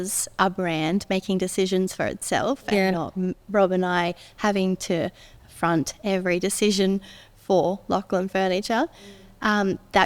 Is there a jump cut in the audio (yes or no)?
no